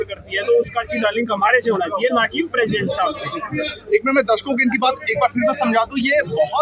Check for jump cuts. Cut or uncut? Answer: uncut